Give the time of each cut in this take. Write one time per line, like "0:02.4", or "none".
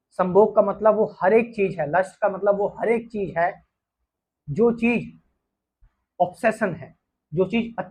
none